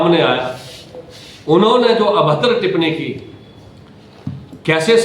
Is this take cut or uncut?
uncut